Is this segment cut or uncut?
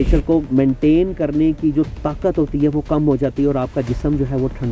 uncut